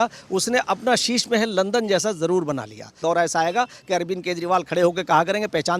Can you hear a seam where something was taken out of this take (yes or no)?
yes